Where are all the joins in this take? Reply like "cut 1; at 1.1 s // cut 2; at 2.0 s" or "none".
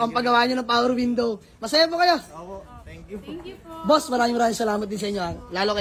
none